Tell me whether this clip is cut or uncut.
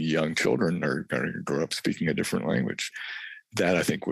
cut